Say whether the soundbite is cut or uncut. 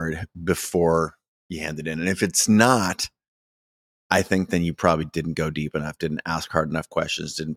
uncut